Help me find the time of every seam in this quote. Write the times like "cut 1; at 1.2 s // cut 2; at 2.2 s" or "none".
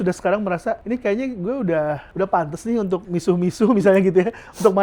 cut 1; at 0.8 s // cut 2; at 2.1 s // cut 3; at 3.1 s

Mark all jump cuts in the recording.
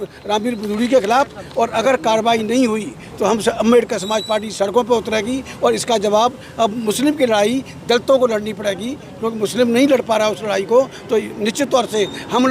none

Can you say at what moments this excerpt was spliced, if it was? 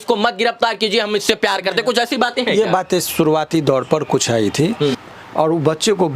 cut 1; at 5.0 s

